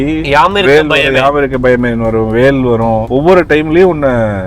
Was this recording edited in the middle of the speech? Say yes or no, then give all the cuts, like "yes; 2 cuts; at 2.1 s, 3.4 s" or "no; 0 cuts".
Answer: yes; 1 cut; at 3.0 s